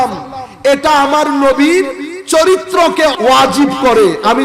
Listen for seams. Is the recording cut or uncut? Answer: cut